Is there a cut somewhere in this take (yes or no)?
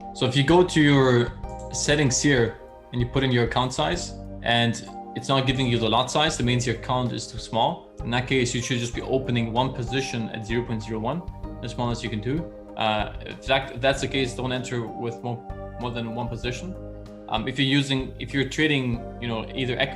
no